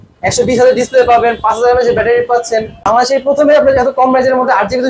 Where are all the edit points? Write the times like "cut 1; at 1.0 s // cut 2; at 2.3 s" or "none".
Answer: cut 1; at 2.8 s